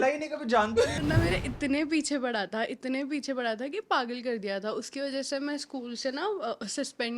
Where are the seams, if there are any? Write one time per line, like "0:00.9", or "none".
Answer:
0:01.0